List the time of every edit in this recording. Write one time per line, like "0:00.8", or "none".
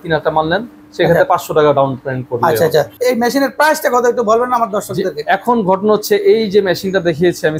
none

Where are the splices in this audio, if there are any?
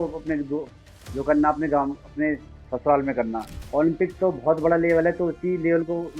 0:03.6

